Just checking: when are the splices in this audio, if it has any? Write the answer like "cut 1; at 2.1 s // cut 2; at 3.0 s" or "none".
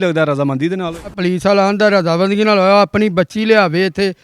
cut 1; at 1.2 s

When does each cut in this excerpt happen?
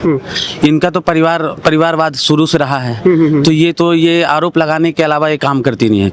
none

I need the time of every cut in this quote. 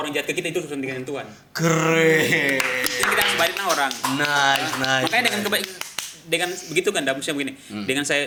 none

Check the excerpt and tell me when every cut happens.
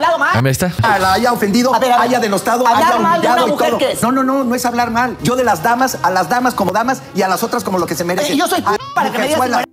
cut 1; at 6.7 s

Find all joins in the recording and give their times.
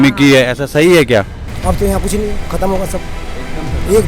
cut 1; at 1.4 s

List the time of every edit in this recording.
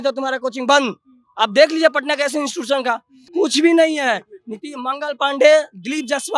cut 1; at 3.2 s

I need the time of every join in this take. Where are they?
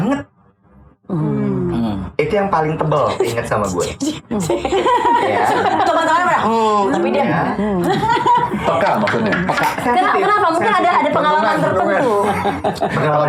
none

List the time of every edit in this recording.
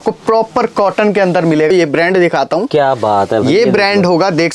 cut 1; at 1.7 s

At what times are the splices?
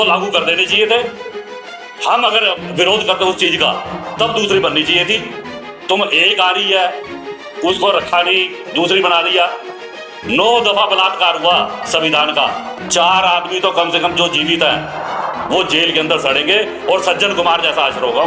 cut 1; at 12.7 s

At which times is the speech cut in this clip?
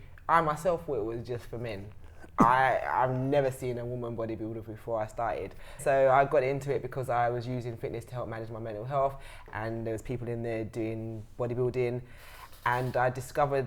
cut 1; at 5.8 s

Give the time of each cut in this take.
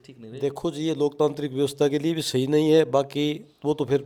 none

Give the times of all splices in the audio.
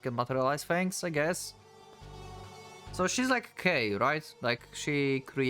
none

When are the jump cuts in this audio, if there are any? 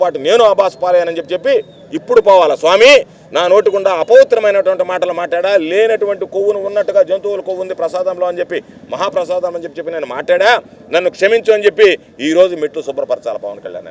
none

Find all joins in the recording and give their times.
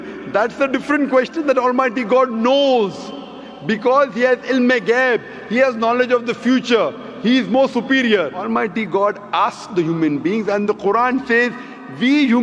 cut 1; at 8.4 s

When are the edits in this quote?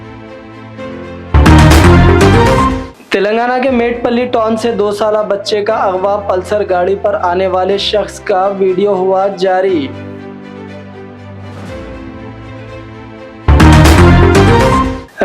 none

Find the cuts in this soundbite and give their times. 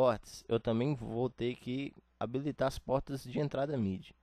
cut 1; at 2.0 s

